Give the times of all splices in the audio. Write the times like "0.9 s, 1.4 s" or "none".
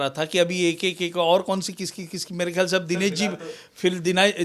none

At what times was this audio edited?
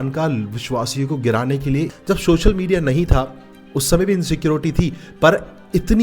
2.0 s

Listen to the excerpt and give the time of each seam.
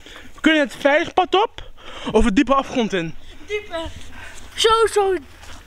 none

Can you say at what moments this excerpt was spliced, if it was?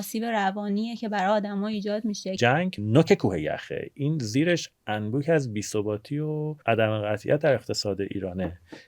2.4 s, 6.5 s

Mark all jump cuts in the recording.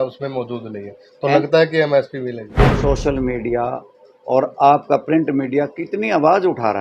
2.5 s

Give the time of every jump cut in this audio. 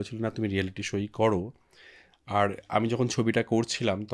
none

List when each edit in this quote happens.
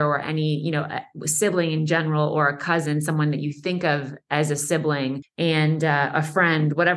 5.2 s

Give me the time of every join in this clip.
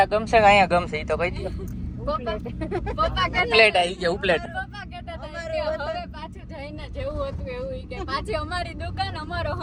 none

